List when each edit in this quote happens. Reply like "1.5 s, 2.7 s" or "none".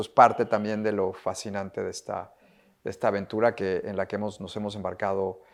none